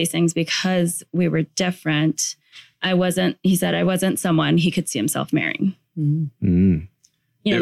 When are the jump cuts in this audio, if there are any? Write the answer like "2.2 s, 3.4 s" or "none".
none